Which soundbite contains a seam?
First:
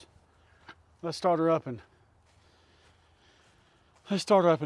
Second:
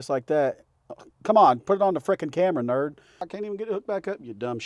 second; 1 cut; at 3.3 s

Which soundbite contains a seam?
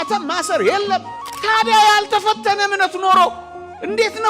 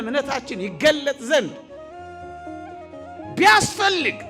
first; 1 cut; at 1.2 s

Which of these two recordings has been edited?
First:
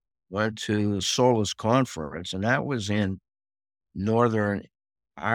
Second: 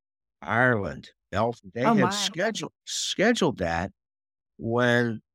second; 1 cut; at 1.6 s

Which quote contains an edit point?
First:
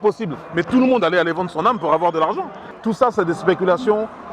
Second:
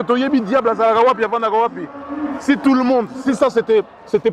first; 1 cut; at 2.7 s

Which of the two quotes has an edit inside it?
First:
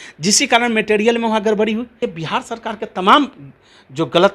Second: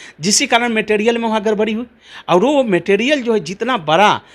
first; 1 cut; at 2.1 s

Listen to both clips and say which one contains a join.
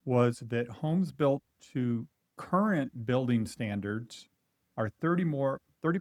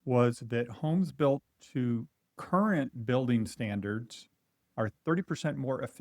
second; 1 cut; at 4.9 s

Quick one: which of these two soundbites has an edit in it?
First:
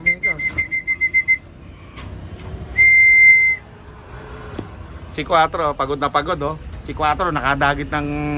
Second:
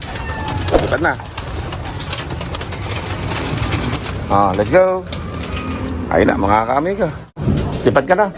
second; 1 cut; at 7.4 s

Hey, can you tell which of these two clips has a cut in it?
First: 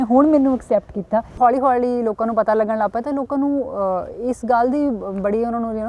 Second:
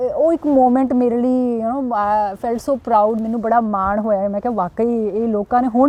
first; 1 cut; at 1.3 s

